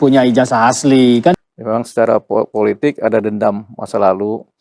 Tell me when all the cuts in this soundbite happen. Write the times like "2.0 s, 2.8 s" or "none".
1.3 s

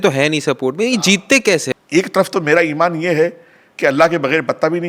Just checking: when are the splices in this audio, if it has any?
1.7 s

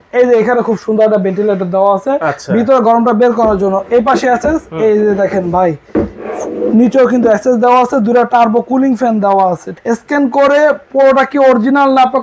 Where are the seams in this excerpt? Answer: 9.7 s

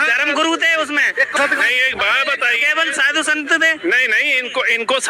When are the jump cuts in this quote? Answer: 1.4 s

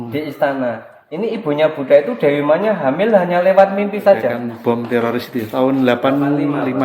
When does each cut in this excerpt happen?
4.4 s

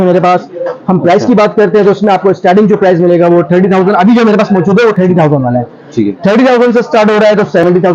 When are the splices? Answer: none

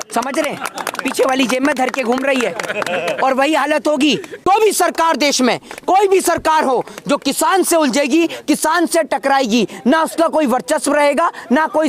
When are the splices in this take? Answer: 4.4 s

